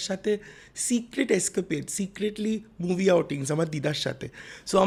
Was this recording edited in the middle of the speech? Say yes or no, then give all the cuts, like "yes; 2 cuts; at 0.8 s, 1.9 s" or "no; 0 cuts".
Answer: no; 0 cuts